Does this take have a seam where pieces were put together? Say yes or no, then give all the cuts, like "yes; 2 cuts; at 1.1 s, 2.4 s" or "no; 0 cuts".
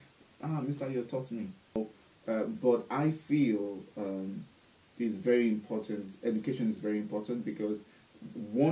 yes; 1 cut; at 1.8 s